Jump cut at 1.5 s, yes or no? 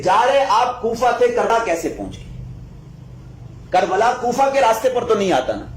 yes